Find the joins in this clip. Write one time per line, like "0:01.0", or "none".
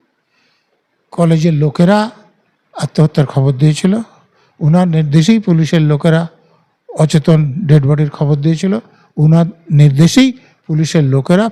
none